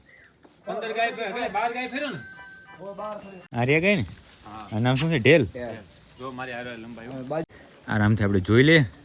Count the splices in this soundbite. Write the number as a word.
two